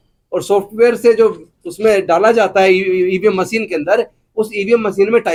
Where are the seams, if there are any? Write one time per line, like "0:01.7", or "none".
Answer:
none

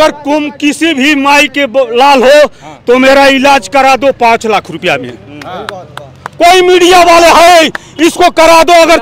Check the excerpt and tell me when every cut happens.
none

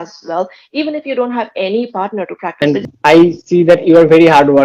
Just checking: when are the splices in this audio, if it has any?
0:02.6

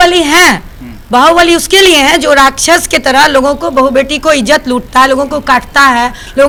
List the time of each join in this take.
none

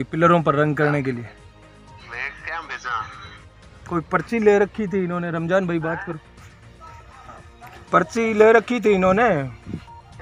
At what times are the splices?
none

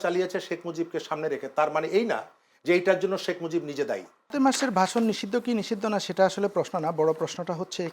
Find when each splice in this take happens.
0:04.3

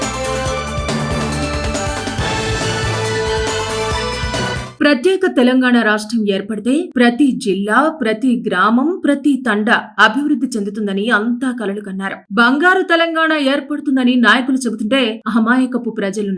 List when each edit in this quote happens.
0:04.7

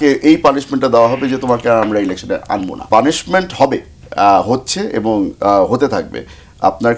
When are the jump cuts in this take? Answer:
0:02.8

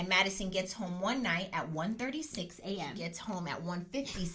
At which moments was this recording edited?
0:03.1

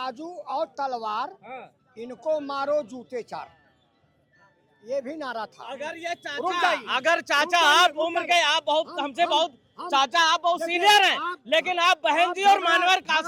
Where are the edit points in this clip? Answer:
none

